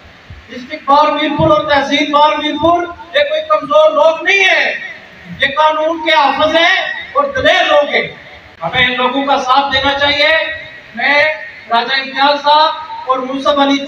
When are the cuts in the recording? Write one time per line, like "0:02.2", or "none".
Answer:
none